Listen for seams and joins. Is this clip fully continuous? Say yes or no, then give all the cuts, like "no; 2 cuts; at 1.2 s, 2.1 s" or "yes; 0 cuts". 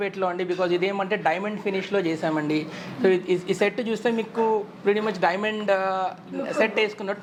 yes; 0 cuts